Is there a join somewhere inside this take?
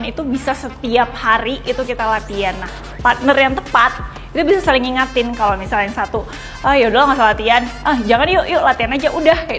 yes; 1 cut; at 2.7 s

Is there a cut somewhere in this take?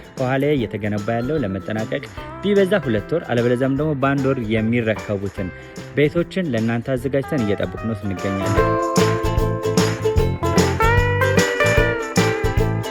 no; 0 cuts

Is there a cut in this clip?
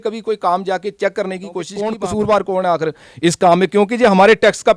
yes; 1 cut; at 1.8 s

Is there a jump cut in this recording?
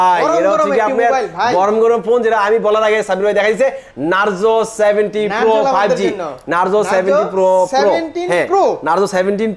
no; 0 cuts

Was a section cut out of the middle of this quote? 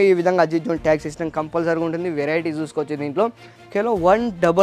yes; 1 cut; at 3.5 s

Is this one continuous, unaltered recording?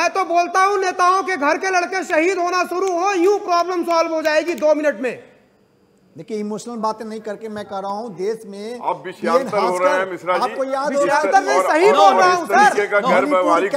yes; 0 cuts

